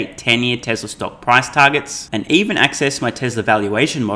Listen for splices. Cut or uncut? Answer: uncut